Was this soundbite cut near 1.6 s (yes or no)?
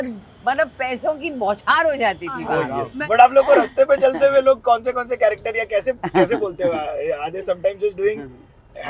no